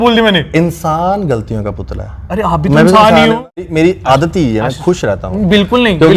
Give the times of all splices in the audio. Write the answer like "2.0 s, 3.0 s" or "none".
3.4 s